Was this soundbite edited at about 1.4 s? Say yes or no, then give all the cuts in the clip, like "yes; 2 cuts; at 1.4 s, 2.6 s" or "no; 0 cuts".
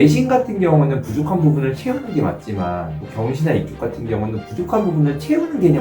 no; 1 cut; at 3.0 s